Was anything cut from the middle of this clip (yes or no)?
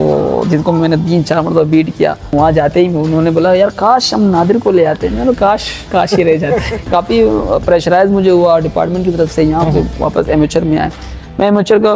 yes